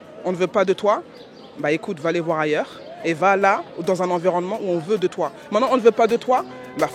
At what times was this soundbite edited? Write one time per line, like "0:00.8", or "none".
none

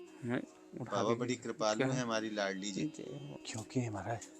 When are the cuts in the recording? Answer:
0:03.4

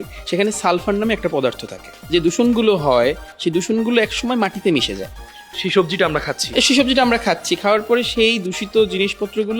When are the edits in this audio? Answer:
0:01.9

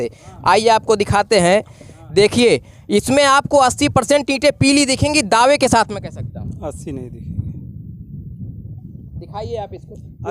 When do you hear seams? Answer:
none

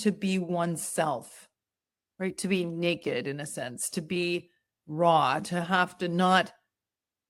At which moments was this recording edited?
none

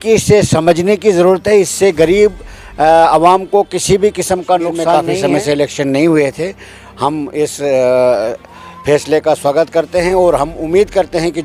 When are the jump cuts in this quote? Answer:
0:04.9

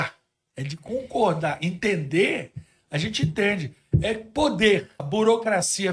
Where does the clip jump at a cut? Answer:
0:05.0

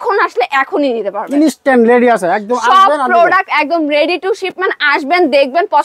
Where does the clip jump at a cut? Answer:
none

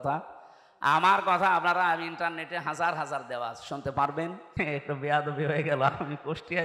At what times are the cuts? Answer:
0:04.6

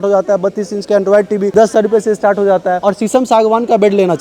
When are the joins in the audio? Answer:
0:02.8

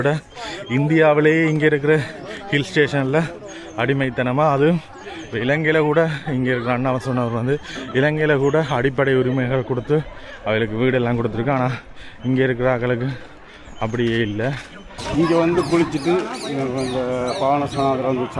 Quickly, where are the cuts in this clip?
0:15.1

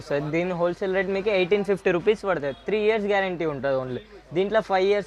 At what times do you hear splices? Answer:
none

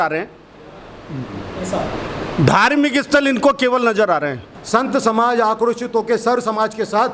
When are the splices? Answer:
0:04.5

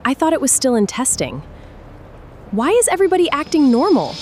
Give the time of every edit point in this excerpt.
none

